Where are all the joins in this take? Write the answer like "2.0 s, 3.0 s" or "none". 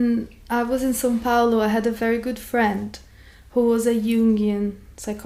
none